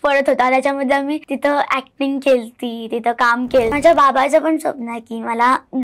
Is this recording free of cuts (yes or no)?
no